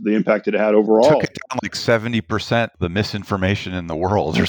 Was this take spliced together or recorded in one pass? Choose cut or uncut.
uncut